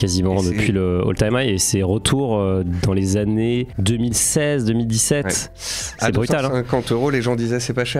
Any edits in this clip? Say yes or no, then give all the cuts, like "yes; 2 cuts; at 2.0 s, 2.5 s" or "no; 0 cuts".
no; 0 cuts